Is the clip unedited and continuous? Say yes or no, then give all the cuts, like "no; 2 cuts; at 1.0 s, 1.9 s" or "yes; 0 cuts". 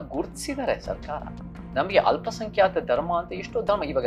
yes; 0 cuts